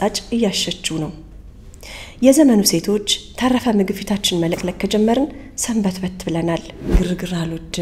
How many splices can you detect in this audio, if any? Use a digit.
1